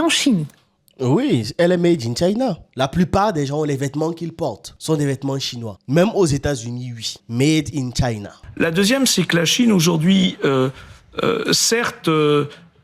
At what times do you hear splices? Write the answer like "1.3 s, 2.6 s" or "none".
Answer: 2.6 s, 8.4 s